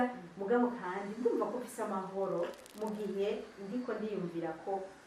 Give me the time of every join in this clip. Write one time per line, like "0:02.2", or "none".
none